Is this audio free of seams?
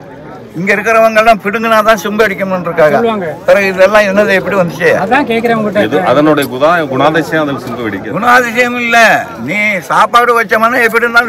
yes; 0 cuts

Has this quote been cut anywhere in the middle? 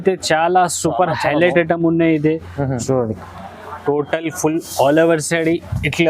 yes; 1 cut; at 2.8 s

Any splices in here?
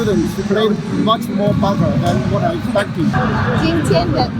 yes; 1 cut; at 3.3 s

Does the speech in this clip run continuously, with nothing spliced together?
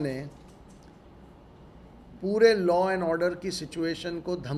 yes; 0 cuts

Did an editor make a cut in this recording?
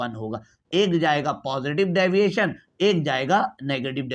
no; 0 cuts

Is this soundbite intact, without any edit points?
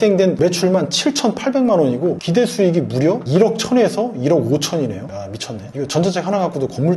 yes; 0 cuts

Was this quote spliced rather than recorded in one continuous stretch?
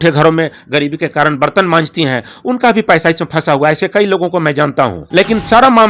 yes; 1 cut; at 5.0 s

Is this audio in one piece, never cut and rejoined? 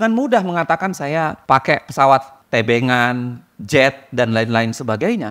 no; 2 cuts; at 1.4 s, 2.4 s

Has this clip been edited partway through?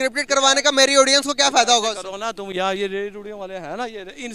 no; 0 cuts

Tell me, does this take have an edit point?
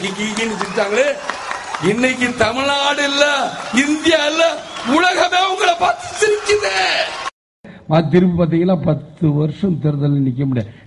yes; 1 cut; at 7.7 s

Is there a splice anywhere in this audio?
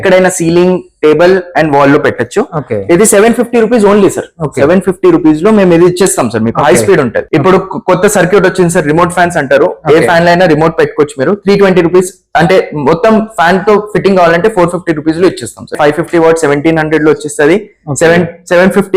yes; 2 cuts; at 7.2 s, 15.8 s

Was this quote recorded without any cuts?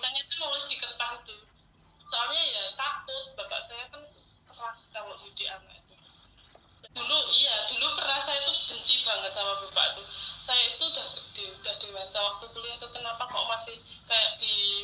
no; 1 cut; at 6.9 s

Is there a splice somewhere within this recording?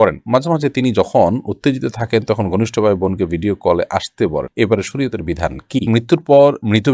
yes; 1 cut; at 5.9 s

